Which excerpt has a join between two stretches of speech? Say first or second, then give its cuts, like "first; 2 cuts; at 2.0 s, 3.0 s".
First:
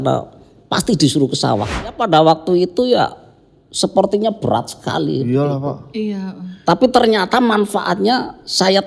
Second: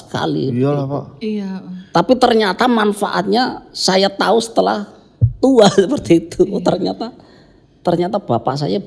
first; 1 cut; at 2.0 s